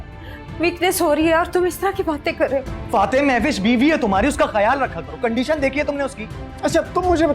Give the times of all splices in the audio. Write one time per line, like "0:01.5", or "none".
0:02.8